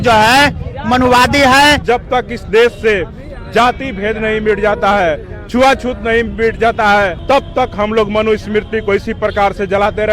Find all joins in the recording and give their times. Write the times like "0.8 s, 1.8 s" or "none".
1.8 s, 7.2 s